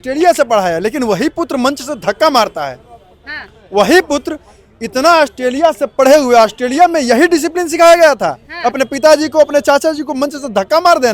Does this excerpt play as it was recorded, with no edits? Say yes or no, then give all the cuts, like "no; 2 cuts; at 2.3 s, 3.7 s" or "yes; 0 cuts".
yes; 0 cuts